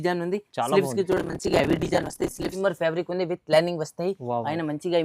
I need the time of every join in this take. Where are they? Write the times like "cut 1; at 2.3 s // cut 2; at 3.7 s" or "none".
cut 1; at 2.5 s